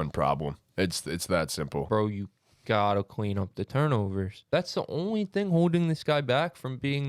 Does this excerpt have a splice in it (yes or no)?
yes